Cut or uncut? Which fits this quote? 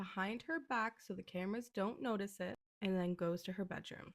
cut